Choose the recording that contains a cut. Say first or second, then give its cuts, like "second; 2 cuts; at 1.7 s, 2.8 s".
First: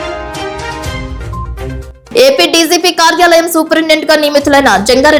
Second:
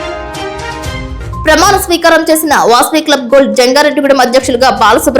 second; 1 cut; at 1.4 s